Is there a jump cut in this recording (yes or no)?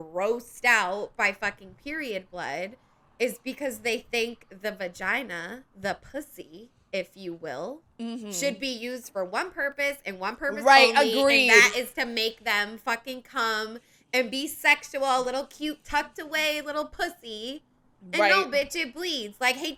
no